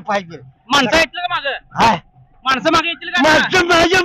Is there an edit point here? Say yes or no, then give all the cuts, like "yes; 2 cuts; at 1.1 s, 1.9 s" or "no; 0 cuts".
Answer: no; 0 cuts